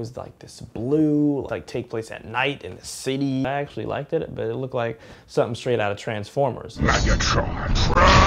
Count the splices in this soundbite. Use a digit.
2